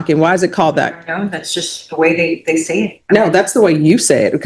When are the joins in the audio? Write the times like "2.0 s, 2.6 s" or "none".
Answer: none